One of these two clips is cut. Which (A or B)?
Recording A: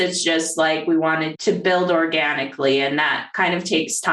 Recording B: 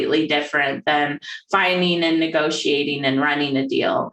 A